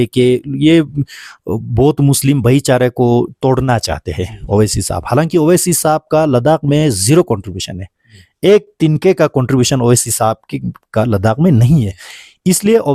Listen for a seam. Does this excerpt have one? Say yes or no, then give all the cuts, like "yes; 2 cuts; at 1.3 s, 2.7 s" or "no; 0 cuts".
no; 0 cuts